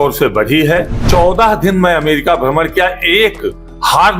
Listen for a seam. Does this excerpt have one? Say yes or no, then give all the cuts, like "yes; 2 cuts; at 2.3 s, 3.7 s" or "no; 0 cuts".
yes; 1 cut; at 1.1 s